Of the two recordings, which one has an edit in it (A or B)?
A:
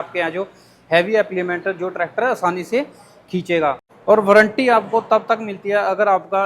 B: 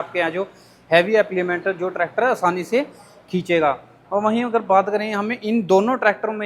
A